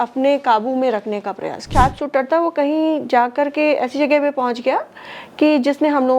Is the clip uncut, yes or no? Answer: no